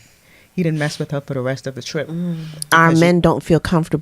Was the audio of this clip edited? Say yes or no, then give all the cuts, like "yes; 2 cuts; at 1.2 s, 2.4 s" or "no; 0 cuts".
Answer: yes; 1 cut; at 2.5 s